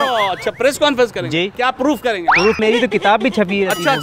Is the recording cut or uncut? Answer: cut